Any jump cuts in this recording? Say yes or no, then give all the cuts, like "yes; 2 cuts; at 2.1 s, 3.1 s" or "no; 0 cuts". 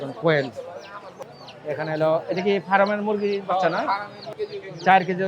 yes; 2 cuts; at 1.2 s, 4.2 s